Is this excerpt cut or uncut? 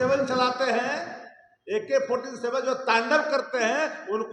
uncut